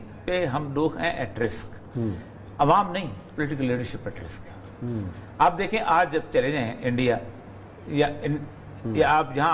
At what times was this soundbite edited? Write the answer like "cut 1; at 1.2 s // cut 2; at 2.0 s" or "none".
none

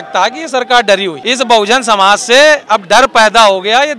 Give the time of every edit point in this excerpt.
cut 1; at 1.2 s

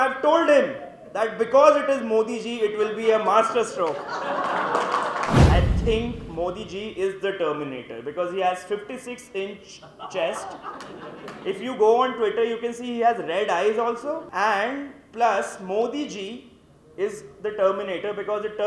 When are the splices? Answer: cut 1; at 5.4 s // cut 2; at 14.3 s

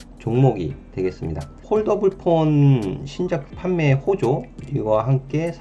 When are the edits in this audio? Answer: cut 1; at 1.6 s // cut 2; at 3.5 s

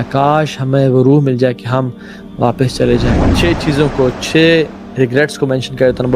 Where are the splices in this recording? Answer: cut 1; at 3.3 s

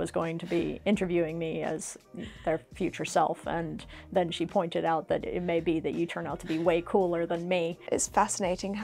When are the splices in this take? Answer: cut 1; at 7.8 s

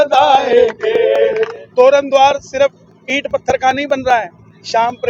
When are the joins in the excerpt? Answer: cut 1; at 1.6 s

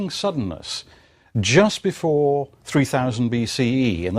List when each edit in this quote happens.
none

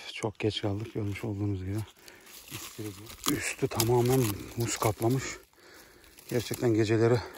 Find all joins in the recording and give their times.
cut 1; at 2.7 s

